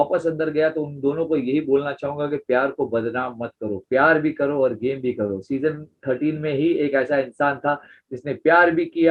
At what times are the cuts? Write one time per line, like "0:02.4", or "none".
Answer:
none